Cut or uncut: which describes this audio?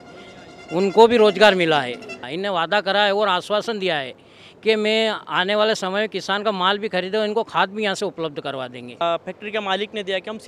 cut